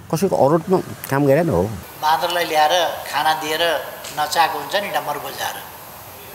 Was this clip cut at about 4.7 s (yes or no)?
no